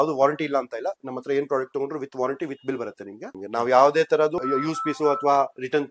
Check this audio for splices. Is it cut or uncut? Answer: cut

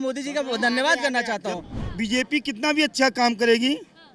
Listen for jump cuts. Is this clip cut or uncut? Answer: cut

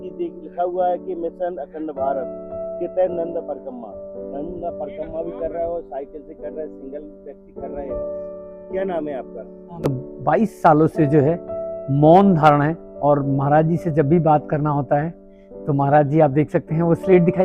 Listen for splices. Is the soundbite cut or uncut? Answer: cut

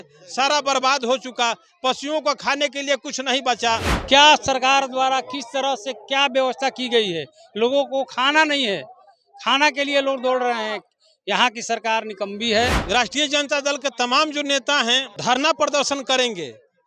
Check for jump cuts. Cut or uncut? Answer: cut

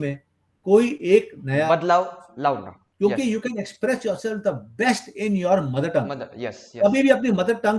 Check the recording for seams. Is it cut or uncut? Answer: cut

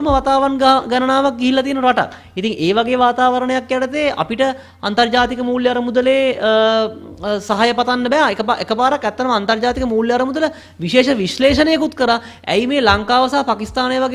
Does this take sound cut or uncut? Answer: uncut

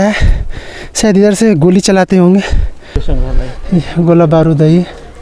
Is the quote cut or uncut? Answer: cut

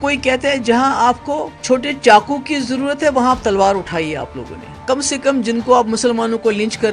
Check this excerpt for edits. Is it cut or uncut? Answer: cut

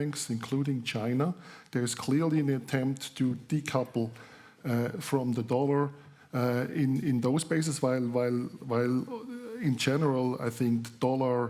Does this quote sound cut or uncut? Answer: uncut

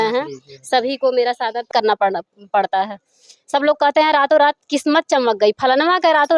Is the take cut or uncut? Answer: cut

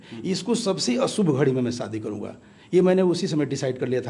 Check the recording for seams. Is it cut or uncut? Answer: uncut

